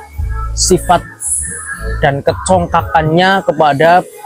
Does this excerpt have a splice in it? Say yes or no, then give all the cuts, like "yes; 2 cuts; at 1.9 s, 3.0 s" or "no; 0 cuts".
no; 0 cuts